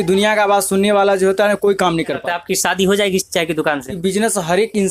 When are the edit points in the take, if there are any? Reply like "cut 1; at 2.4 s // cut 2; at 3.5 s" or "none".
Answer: cut 1; at 2.2 s // cut 2; at 4.1 s